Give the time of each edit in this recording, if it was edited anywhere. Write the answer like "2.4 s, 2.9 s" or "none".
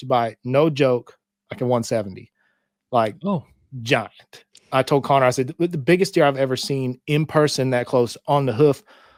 none